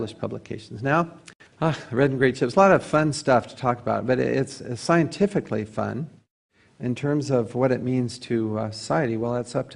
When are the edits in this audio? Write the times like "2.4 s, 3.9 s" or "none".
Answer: 7.2 s

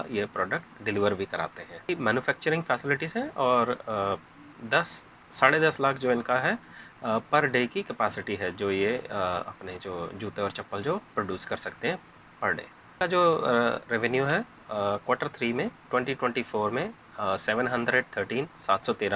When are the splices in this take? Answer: none

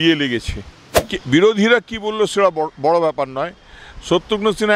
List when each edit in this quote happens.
1.1 s

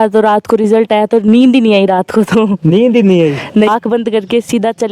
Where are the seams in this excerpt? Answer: 3.7 s

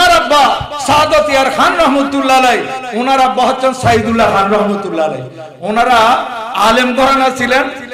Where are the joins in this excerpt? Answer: none

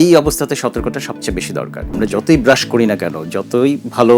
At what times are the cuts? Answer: 1.8 s

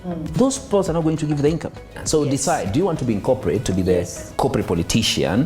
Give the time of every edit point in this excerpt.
2.0 s

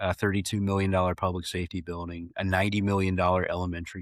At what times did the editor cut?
none

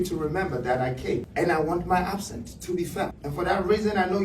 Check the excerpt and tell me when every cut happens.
1.3 s, 3.2 s

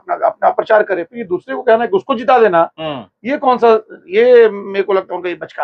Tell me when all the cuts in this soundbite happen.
none

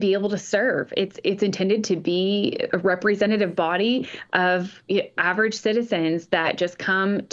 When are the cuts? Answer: none

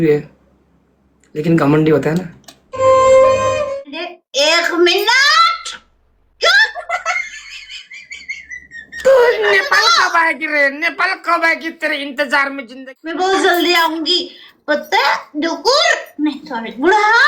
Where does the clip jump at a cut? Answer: 3.6 s, 12.7 s

